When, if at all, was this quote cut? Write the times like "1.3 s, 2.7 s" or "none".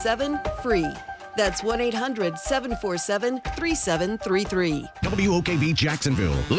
4.9 s